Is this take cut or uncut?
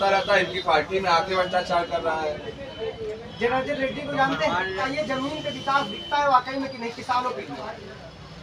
cut